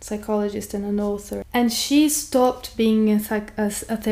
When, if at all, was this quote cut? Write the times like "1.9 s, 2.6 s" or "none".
1.4 s